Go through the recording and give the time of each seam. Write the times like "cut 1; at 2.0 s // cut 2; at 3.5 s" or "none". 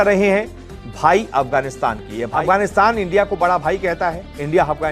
cut 1; at 2.3 s